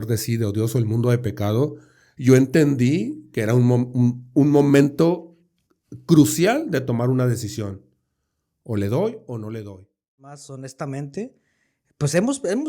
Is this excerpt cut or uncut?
cut